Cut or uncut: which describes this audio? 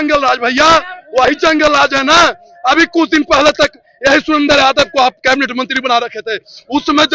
uncut